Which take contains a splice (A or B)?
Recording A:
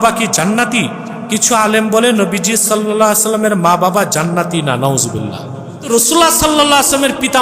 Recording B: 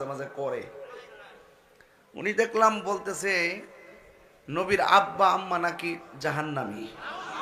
A